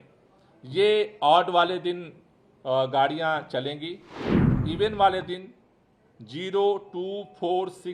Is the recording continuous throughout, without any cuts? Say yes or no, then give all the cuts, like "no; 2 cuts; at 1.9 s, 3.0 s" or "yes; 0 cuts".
no; 1 cut; at 4.5 s